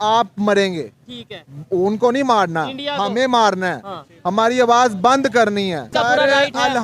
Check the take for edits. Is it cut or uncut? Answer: cut